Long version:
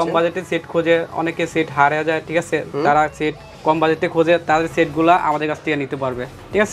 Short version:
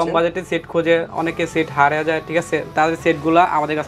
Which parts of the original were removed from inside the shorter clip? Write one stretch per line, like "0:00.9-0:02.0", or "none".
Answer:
0:02.7-0:04.4